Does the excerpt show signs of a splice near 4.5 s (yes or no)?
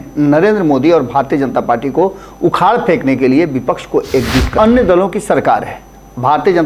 yes